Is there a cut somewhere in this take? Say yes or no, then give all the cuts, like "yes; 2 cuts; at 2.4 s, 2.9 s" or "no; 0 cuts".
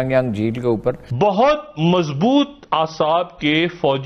yes; 1 cut; at 1.1 s